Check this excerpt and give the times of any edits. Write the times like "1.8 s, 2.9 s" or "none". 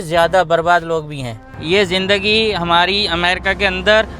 1.5 s